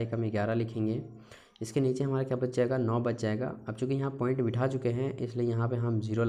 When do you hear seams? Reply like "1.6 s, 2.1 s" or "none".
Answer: none